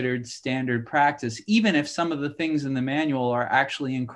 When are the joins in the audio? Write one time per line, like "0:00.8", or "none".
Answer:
none

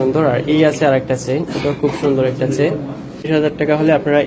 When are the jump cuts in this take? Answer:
0:03.3

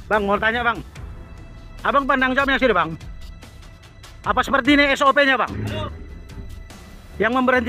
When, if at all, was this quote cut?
none

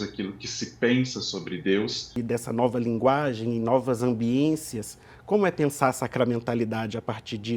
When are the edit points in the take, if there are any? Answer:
0:02.1

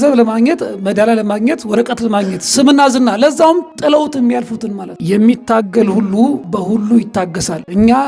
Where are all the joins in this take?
none

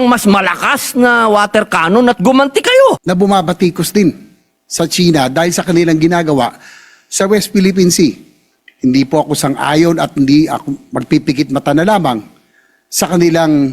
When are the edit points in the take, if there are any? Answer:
0:03.0

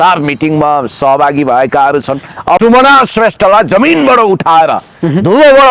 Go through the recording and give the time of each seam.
0:02.6

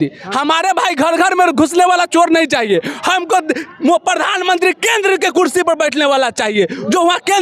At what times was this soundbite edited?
none

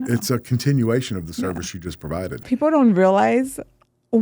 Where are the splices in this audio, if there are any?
0:02.4

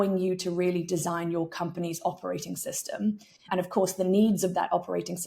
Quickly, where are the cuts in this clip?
0:03.5

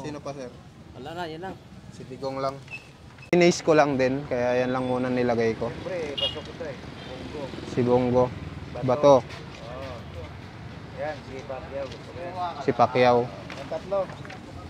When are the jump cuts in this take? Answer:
0:03.3

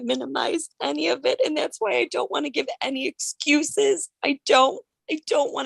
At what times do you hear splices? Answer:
none

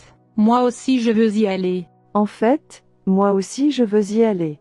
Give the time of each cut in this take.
0:02.0

